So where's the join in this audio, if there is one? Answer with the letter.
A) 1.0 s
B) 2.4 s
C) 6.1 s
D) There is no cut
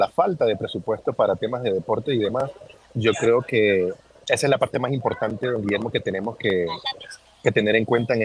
D